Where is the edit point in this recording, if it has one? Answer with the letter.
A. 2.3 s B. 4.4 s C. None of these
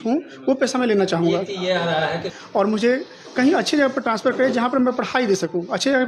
A